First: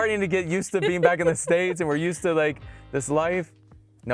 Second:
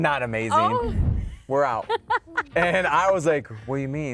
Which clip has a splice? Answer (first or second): second